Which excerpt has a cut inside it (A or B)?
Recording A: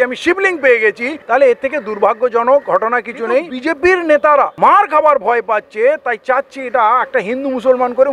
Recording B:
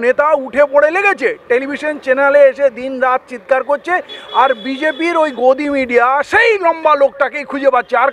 A